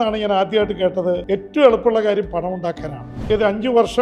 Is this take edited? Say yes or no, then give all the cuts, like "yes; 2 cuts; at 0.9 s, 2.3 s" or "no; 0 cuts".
yes; 2 cuts; at 1.2 s, 3.1 s